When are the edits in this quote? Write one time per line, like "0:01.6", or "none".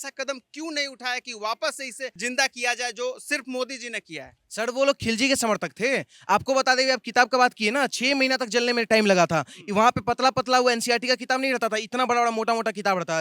0:02.2